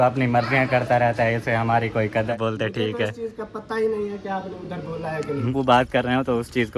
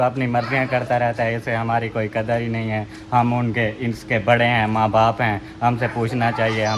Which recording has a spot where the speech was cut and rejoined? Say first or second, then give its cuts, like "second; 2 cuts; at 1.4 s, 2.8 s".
first; 2 cuts; at 2.3 s, 5.5 s